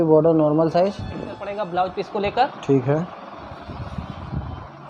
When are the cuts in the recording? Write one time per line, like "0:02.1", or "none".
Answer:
0:01.5